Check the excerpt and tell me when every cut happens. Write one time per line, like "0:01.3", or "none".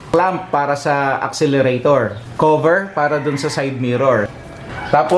0:02.2